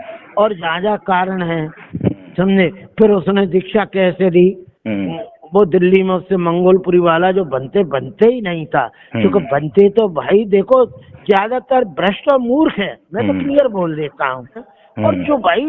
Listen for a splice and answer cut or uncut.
cut